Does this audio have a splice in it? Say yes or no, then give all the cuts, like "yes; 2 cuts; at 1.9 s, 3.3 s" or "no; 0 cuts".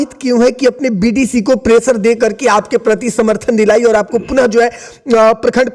no; 0 cuts